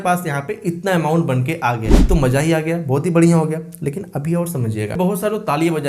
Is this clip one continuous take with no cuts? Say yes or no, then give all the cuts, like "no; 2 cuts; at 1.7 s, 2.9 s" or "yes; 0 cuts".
no; 1 cut; at 4.9 s